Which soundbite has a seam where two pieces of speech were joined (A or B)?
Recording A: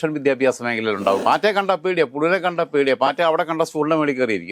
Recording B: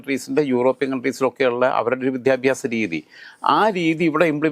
A